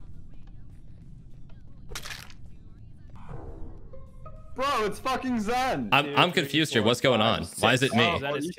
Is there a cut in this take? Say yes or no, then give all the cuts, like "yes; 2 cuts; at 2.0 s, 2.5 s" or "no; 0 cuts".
yes; 2 cuts; at 3.1 s, 5.9 s